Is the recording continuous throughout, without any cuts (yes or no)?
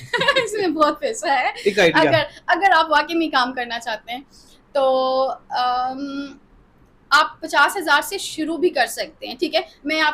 yes